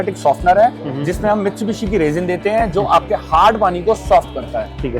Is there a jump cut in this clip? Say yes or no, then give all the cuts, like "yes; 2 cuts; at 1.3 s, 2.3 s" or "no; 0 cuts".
no; 0 cuts